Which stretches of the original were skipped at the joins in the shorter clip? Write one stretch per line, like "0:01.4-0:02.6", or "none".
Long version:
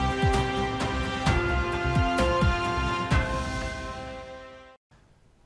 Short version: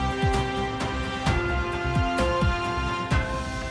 none

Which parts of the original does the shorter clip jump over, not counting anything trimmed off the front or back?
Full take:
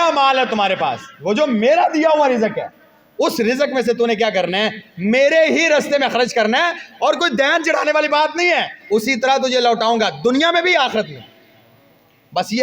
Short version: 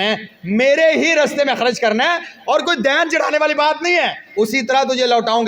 none

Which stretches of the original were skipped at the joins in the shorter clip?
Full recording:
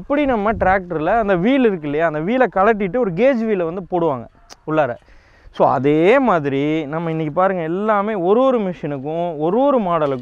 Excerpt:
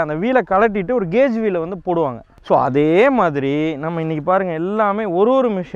0:04.3-0:05.4

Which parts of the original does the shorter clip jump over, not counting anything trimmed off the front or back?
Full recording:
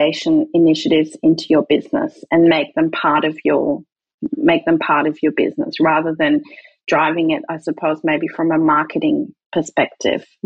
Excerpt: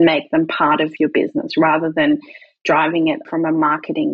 0:03.4-0:05.2
0:07.5-0:08.3

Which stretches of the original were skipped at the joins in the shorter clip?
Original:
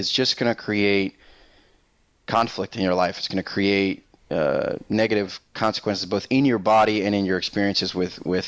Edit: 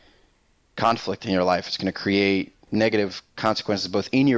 0:04.1-0:04.8

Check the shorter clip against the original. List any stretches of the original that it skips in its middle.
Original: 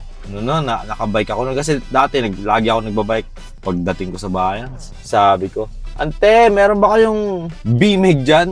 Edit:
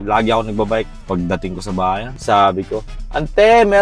0:03.3-0:03.5
0:04.7-0:05.0

